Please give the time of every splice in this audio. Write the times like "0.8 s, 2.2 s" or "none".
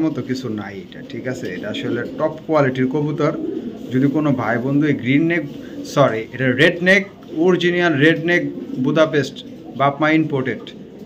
none